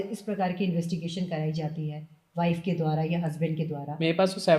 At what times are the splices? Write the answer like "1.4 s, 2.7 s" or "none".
none